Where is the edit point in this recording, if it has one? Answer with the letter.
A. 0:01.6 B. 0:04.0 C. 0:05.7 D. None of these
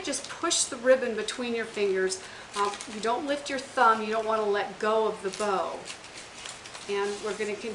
B